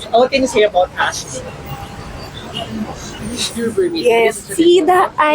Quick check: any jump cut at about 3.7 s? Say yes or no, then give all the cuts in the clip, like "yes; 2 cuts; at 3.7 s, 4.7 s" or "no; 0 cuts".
yes; 1 cut; at 3.7 s